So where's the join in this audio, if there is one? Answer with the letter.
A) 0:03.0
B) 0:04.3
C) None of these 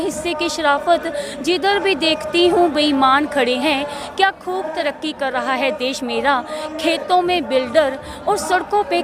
C